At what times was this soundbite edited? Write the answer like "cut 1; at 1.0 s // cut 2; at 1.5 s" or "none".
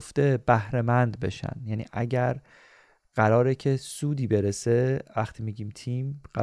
none